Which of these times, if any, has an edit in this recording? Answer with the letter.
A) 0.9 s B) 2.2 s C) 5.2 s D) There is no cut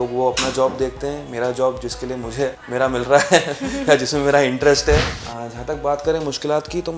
C